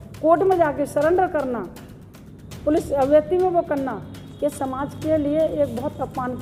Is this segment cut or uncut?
uncut